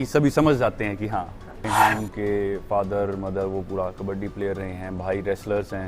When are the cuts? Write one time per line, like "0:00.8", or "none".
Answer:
0:01.7